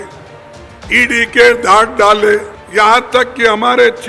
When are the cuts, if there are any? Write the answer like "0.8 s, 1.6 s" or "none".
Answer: 2.6 s